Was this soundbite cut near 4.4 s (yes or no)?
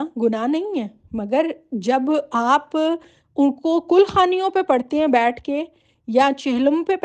no